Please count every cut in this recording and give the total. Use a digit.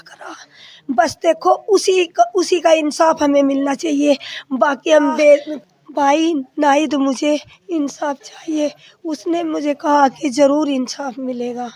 1